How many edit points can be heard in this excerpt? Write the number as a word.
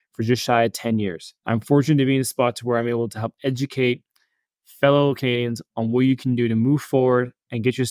one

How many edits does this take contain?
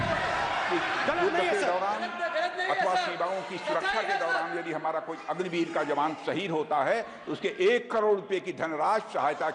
zero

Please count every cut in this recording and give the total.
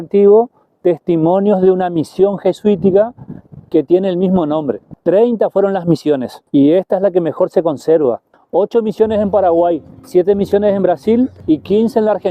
five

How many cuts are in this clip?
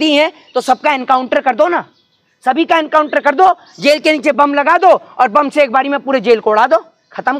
zero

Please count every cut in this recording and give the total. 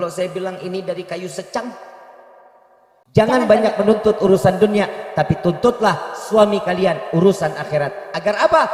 one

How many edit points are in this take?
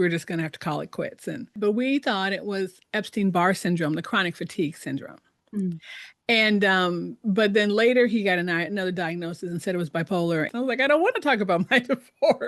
two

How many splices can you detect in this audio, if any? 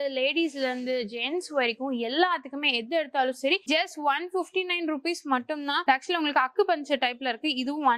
one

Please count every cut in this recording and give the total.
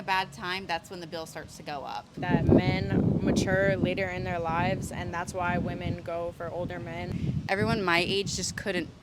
two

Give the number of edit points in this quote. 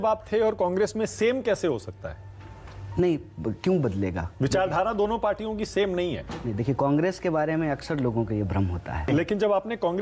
one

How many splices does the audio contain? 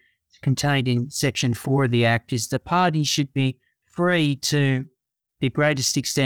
zero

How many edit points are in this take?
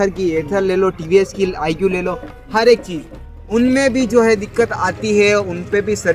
zero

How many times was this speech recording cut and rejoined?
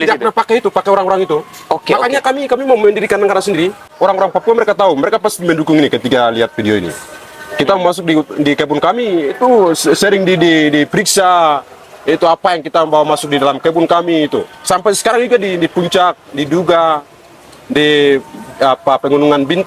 one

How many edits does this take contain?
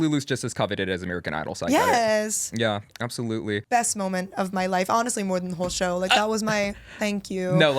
one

